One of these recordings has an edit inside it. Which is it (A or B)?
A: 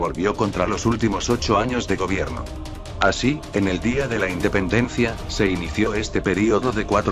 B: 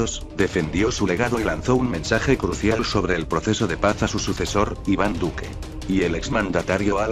A